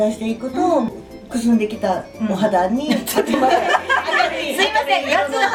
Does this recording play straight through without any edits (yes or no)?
yes